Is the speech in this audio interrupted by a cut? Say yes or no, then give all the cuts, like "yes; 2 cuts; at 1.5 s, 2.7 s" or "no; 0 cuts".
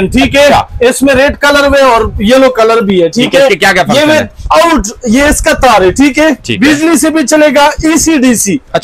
no; 0 cuts